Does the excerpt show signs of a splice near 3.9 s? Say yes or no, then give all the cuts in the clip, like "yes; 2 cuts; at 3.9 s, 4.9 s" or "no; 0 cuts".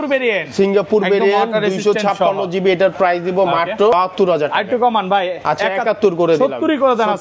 yes; 1 cut; at 3.9 s